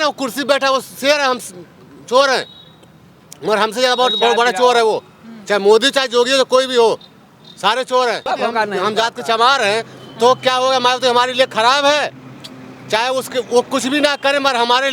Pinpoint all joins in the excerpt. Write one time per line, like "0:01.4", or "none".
0:08.3